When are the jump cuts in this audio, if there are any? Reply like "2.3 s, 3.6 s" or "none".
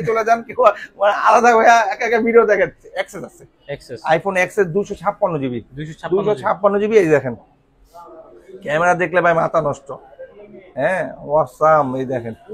2.9 s